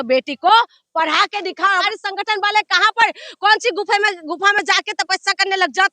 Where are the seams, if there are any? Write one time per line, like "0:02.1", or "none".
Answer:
0:01.8